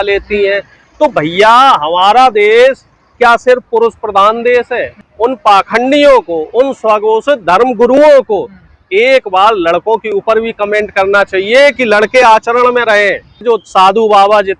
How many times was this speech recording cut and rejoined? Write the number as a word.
two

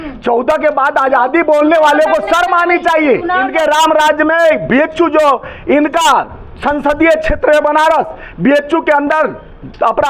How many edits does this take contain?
one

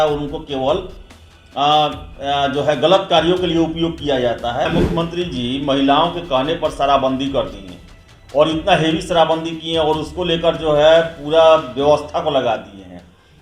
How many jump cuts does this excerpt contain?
one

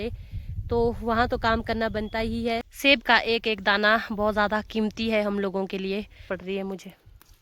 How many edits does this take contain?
two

